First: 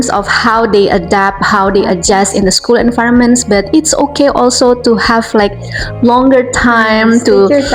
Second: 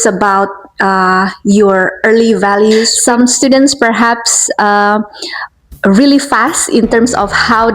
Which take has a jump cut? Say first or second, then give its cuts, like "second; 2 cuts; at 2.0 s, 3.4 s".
second; 1 cut; at 2.9 s